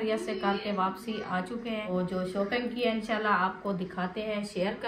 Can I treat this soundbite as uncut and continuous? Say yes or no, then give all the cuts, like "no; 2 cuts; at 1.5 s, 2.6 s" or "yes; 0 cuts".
no; 1 cut; at 1.9 s